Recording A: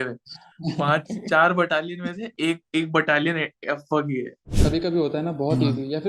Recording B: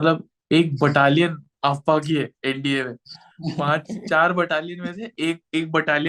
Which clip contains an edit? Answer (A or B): A